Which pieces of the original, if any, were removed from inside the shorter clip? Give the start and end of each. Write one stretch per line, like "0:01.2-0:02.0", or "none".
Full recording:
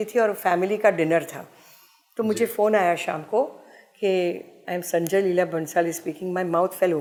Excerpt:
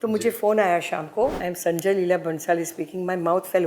0:03.6-0:04.7